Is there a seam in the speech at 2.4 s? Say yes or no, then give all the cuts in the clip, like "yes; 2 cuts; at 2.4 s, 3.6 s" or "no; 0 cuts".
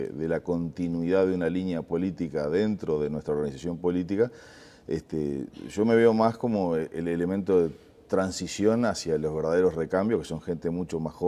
yes; 1 cut; at 2.4 s